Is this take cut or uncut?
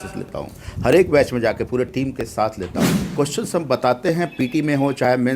cut